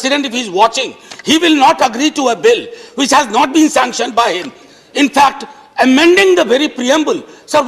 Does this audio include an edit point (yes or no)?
no